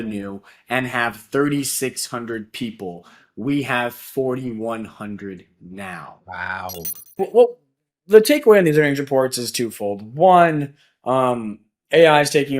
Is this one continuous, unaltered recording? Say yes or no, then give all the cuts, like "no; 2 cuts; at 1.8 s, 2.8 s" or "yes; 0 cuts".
no; 1 cut; at 7.2 s